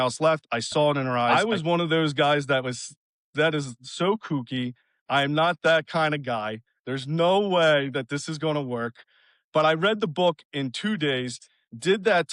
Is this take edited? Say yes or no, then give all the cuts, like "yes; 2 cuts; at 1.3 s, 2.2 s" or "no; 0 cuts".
yes; 1 cut; at 1.2 s